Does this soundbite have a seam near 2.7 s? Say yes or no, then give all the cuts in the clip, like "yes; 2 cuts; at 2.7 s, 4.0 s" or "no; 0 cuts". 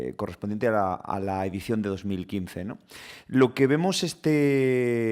yes; 1 cut; at 2.7 s